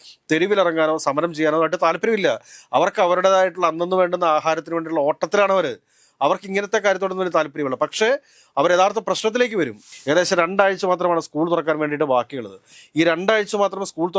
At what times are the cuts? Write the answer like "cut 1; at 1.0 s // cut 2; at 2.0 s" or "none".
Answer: cut 1; at 9.9 s